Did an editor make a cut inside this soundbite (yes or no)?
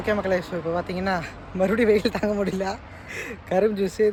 no